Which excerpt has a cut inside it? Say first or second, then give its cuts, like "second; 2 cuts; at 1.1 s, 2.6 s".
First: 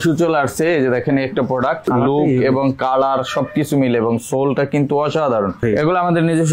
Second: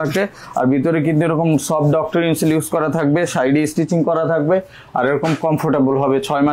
first; 2 cuts; at 1.8 s, 5.6 s